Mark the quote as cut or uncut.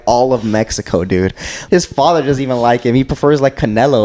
cut